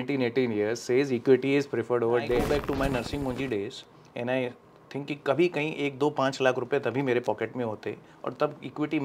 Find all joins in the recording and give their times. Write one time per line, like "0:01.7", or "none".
0:02.4